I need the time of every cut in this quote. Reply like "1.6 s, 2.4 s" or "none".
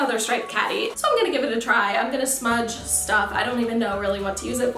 0.9 s